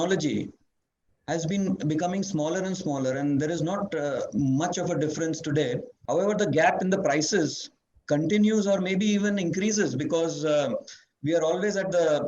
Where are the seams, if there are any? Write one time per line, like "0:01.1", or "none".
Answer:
0:05.9